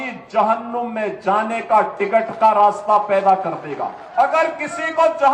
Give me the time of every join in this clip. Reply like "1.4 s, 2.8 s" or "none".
4.0 s